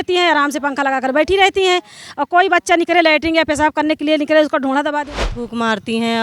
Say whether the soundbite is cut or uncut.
cut